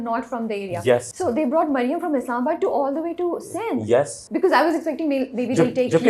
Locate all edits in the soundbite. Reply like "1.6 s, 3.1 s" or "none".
1.1 s, 4.2 s